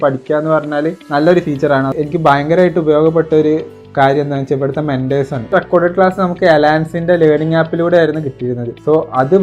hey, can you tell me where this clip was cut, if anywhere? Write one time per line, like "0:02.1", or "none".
0:01.9
0:05.5